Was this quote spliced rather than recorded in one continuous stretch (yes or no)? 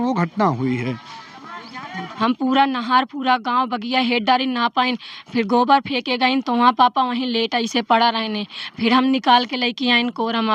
yes